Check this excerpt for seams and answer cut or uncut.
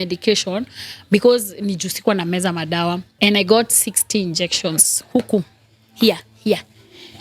cut